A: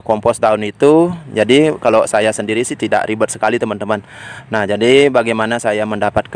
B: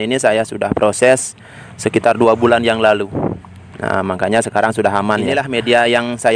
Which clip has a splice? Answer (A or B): B